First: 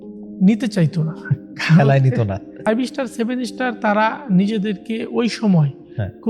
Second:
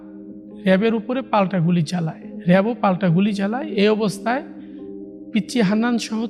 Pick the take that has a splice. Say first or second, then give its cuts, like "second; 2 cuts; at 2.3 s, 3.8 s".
first; 1 cut; at 2.5 s